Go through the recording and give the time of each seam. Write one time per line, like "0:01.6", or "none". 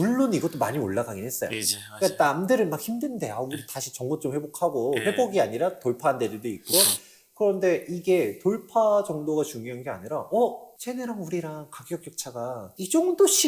none